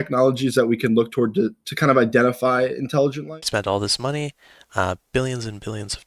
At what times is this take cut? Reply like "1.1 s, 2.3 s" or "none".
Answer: 3.2 s

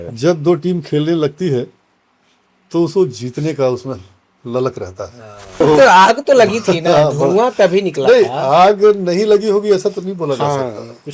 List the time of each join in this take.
5.6 s

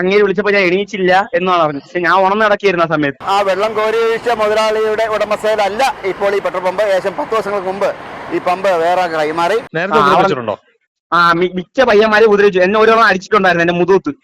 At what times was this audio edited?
3.2 s, 9.7 s

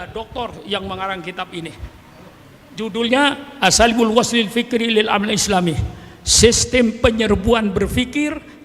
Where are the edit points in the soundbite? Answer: none

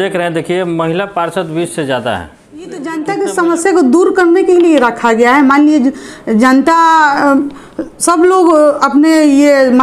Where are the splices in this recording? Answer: 2.9 s

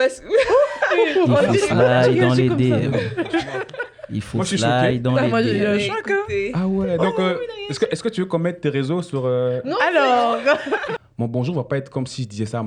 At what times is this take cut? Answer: 11.0 s

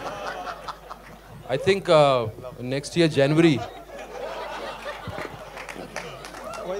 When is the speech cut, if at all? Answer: none

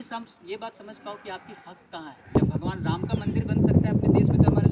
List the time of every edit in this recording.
2.4 s

